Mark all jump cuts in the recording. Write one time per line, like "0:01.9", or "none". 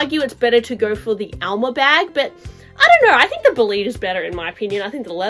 none